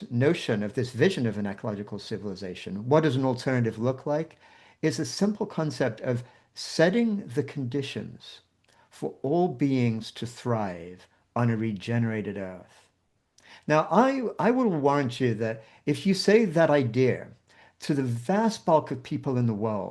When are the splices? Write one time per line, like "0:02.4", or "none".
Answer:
none